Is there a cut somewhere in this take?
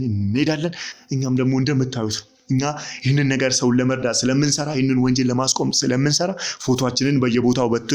yes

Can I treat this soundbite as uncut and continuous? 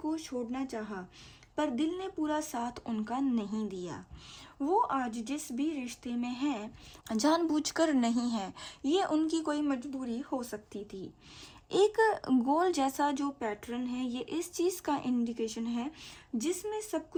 yes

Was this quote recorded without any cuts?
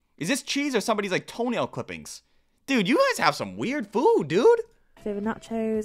yes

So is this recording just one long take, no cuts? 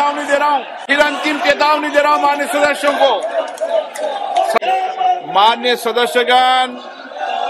no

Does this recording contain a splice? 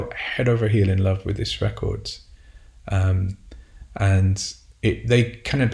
no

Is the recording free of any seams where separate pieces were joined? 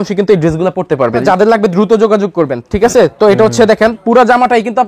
no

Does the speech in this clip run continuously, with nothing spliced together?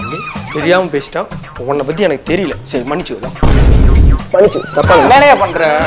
yes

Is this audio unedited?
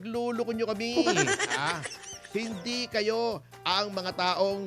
yes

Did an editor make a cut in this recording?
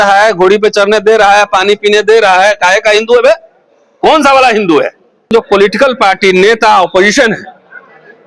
yes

